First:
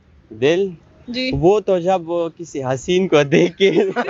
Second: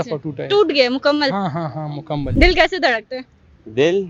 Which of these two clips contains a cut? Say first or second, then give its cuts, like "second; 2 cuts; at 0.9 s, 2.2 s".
second; 1 cut; at 2.3 s